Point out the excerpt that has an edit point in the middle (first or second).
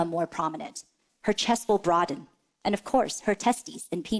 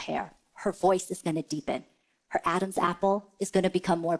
second